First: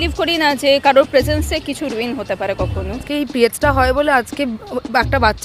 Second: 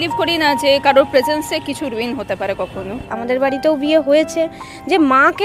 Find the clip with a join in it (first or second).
first